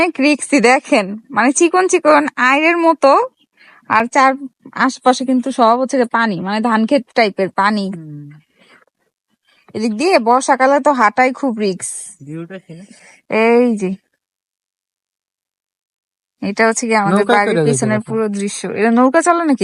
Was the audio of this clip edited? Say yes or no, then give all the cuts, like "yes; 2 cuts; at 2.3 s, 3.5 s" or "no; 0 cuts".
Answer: no; 0 cuts